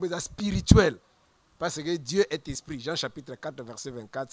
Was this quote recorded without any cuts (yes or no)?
yes